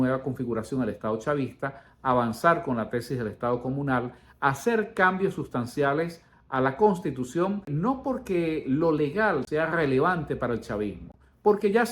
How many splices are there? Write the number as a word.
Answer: two